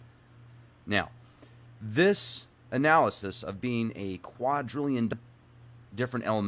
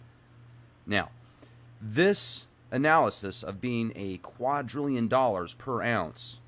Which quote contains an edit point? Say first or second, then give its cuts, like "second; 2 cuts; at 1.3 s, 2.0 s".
second; 1 cut; at 5.1 s